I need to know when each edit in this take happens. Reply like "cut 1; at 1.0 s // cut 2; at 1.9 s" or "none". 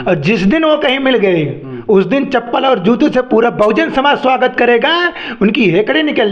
none